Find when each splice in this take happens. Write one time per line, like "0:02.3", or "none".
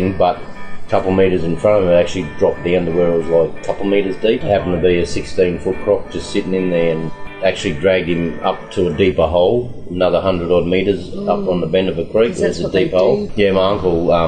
0:04.4
0:07.1
0:13.3